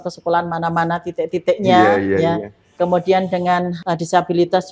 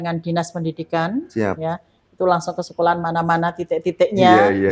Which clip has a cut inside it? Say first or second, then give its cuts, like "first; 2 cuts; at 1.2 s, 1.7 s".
first; 1 cut; at 3.8 s